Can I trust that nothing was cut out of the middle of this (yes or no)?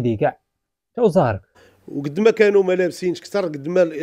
no